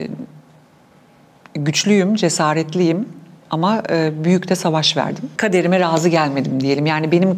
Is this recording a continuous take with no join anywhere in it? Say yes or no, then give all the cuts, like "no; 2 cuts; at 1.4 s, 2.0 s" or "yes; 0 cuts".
no; 1 cut; at 5.2 s